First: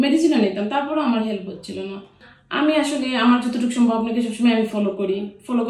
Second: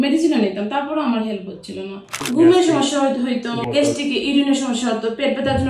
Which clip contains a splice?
second; 1 cut; at 2.1 s

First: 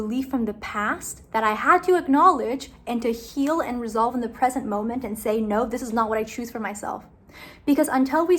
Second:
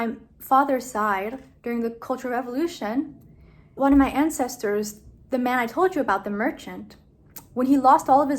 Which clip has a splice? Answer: second; 1 cut; at 3.7 s

